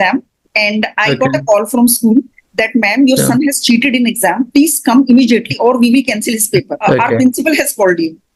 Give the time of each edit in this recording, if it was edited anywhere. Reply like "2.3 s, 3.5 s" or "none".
none